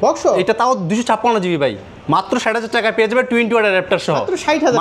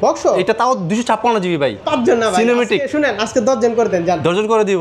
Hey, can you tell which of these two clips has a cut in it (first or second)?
second